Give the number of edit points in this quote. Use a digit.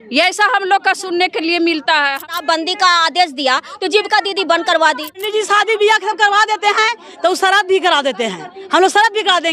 2